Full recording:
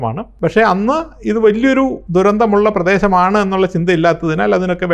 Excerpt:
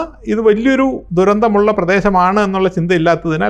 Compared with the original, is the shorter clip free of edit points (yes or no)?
yes